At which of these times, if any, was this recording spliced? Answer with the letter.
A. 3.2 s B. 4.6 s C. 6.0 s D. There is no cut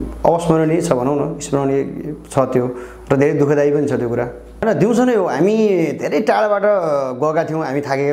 B